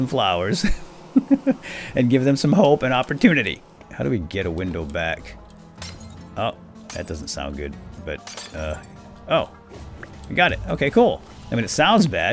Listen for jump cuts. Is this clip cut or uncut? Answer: cut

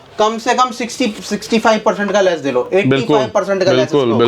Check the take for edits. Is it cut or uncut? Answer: uncut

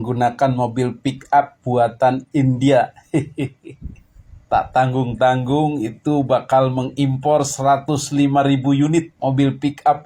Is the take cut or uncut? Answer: uncut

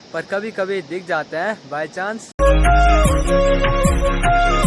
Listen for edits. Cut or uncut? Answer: uncut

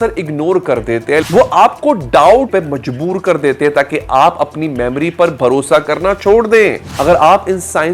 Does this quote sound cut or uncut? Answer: cut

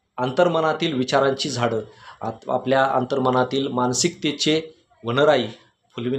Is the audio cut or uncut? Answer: uncut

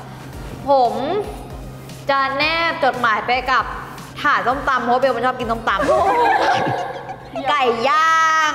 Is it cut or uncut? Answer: uncut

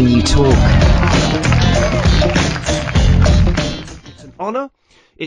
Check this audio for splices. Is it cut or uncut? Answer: cut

